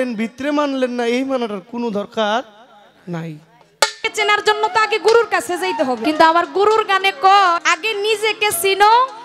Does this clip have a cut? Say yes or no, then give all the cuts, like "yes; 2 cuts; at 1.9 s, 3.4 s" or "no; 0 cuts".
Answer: yes; 3 cuts; at 4.0 s, 6.0 s, 7.7 s